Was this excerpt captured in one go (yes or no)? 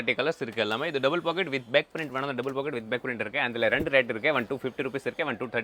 yes